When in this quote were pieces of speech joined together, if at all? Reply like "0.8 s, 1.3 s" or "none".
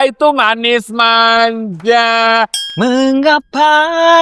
2.6 s